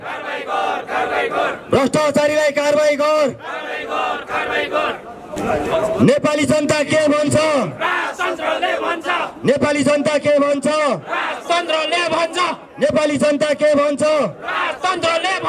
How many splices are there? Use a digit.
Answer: 0